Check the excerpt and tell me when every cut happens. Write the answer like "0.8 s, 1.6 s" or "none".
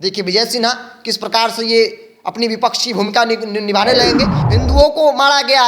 4.4 s

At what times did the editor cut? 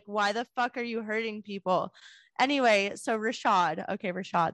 none

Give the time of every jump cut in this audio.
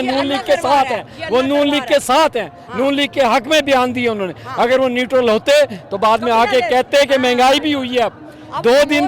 none

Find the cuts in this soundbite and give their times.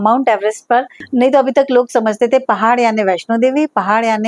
1.0 s

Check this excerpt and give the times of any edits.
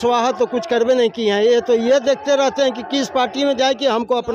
none

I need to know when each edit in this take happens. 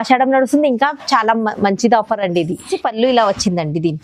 2.7 s

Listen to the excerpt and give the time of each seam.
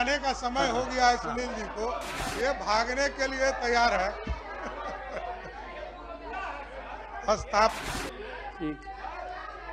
2.2 s, 7.9 s

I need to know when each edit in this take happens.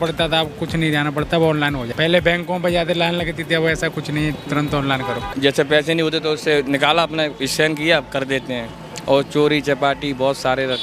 5.3 s

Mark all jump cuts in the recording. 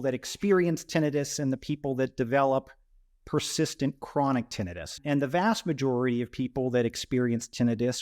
4.9 s

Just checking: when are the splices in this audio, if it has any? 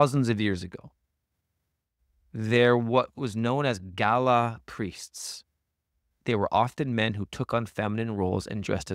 6.0 s

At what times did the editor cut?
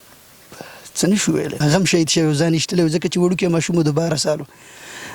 1.5 s

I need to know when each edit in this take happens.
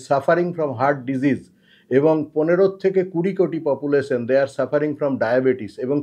none

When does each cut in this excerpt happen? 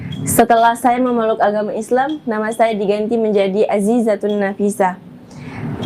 none

